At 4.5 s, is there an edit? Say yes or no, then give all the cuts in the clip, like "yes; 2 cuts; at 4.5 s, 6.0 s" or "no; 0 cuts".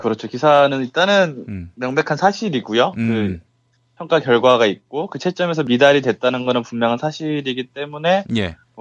no; 1 cut; at 3.1 s